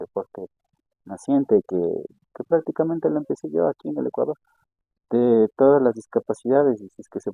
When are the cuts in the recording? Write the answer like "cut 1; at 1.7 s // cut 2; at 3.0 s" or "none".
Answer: none